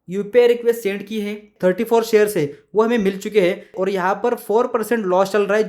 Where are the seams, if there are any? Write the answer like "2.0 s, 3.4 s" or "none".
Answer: 1.5 s, 3.8 s